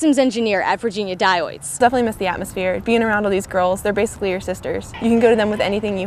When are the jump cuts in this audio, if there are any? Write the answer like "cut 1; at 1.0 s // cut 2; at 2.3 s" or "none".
none